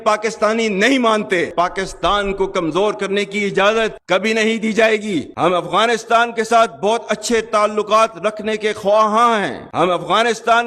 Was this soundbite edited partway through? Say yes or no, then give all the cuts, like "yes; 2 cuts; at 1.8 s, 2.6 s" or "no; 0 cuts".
yes; 3 cuts; at 1.5 s, 5.3 s, 9.6 s